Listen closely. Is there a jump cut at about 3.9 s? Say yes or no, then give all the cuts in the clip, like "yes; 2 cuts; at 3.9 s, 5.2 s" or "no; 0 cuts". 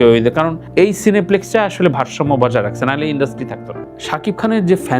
yes; 1 cut; at 3.9 s